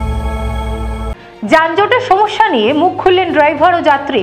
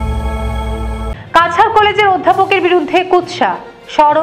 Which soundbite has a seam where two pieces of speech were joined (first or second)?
second